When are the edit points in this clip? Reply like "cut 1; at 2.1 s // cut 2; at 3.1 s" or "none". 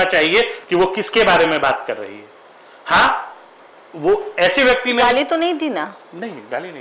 none